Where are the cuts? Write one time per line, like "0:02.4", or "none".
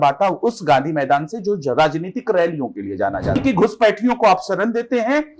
0:03.4